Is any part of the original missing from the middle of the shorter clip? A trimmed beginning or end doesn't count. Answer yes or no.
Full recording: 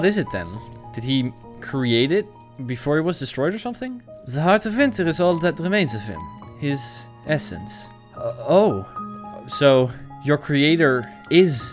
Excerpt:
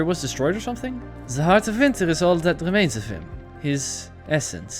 no